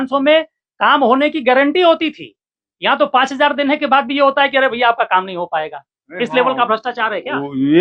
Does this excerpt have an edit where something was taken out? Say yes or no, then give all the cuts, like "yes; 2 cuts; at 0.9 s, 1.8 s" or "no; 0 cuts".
no; 0 cuts